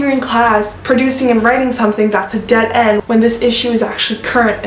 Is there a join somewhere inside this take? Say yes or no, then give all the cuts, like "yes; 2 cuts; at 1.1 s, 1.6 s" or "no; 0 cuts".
no; 0 cuts